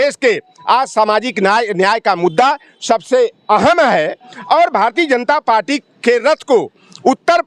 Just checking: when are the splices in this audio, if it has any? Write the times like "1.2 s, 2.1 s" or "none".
none